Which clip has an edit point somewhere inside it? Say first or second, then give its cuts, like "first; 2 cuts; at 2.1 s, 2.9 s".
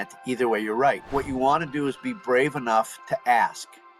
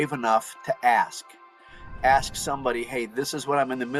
first; 1 cut; at 1.0 s